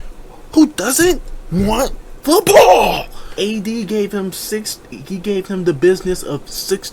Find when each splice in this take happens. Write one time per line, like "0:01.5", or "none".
0:03.2